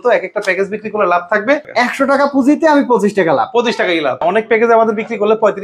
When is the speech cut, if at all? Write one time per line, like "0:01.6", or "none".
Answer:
0:01.7
0:04.2